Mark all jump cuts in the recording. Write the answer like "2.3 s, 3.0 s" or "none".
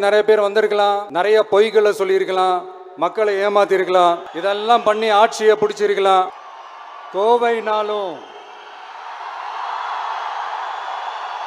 1.1 s, 4.3 s, 6.3 s